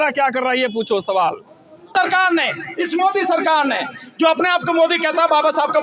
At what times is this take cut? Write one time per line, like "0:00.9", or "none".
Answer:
0:01.9